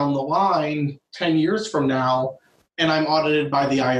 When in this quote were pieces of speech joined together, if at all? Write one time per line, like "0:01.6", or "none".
none

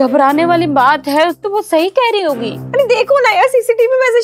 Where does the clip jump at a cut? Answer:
0:01.4
0:02.6

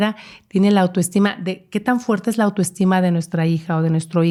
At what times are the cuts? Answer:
none

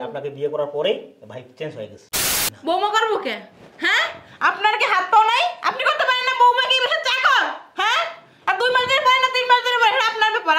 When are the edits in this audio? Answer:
0:02.1

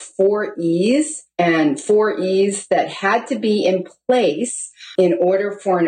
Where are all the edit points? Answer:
0:01.2
0:04.9

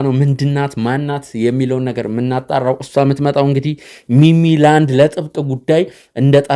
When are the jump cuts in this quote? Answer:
none

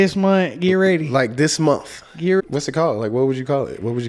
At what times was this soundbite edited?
0:02.4

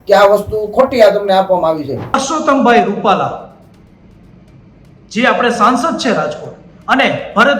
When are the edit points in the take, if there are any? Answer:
0:02.2

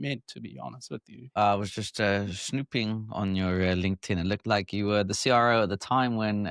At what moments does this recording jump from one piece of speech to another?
0:01.3

